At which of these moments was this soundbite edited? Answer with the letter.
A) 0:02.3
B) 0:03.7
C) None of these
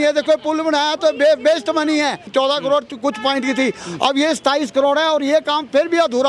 A